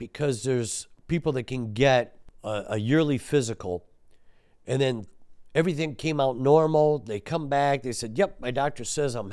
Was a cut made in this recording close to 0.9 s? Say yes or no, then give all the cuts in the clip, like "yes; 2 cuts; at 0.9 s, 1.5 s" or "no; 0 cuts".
yes; 1 cut; at 0.9 s